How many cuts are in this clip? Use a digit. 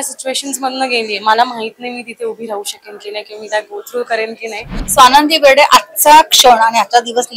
1